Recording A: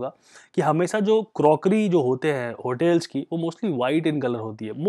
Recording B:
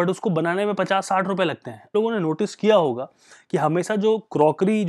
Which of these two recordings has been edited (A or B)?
B